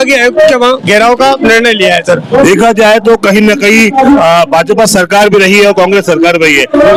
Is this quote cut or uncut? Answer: uncut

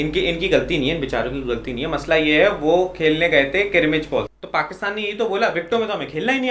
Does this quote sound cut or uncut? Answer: cut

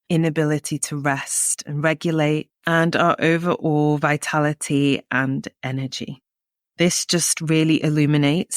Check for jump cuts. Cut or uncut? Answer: cut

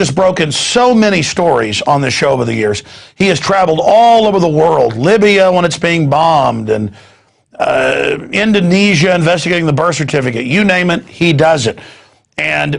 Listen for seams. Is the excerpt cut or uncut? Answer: cut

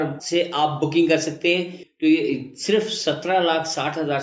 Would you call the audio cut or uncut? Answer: cut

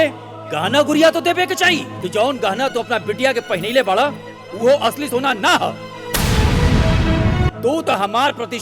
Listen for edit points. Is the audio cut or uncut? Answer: cut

